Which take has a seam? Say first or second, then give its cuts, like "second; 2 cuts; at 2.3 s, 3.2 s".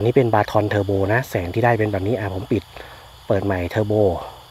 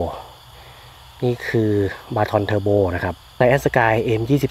second; 1 cut; at 3.3 s